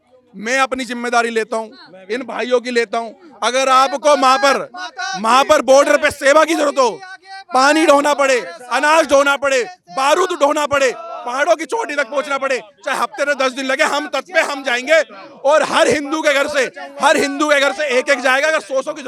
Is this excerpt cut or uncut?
uncut